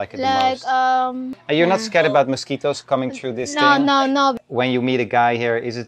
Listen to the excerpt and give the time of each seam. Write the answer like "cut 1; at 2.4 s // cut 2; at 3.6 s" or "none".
cut 1; at 1.3 s // cut 2; at 4.4 s

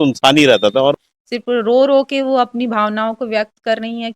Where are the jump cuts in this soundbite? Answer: cut 1; at 0.9 s

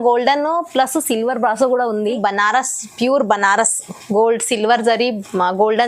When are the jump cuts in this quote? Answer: cut 1; at 2.2 s

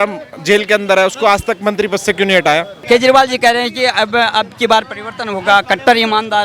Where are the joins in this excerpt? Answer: cut 1; at 2.7 s

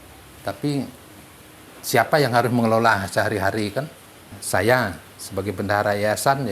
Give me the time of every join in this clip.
cut 1; at 4.3 s

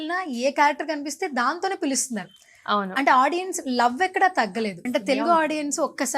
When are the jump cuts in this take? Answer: cut 1; at 4.9 s

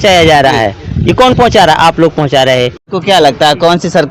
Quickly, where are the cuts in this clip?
cut 1; at 2.9 s

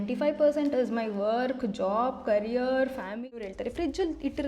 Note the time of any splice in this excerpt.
cut 1; at 3.4 s

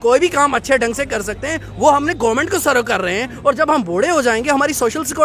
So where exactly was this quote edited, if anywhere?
none

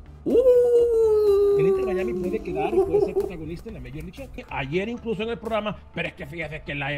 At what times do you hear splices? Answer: cut 1; at 4.5 s

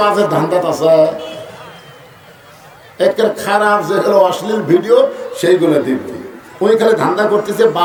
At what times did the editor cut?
none

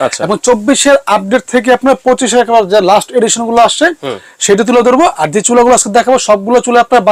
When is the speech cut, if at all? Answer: none

